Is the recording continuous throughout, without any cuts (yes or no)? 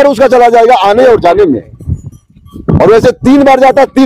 yes